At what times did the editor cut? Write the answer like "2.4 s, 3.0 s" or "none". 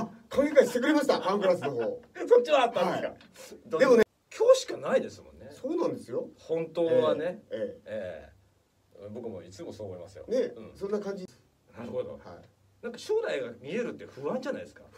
4.0 s, 11.3 s